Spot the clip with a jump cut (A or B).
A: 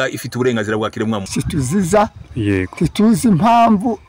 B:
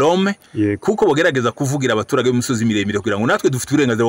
A